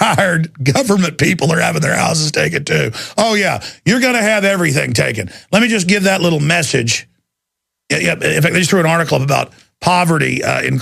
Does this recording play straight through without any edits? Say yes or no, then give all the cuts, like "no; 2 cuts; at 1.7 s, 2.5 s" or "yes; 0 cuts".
yes; 0 cuts